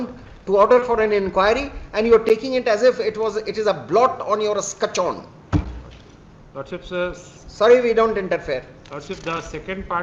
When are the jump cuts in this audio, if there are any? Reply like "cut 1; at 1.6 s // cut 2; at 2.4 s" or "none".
none